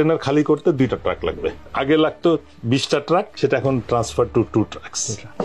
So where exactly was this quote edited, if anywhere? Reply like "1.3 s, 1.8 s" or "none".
1.6 s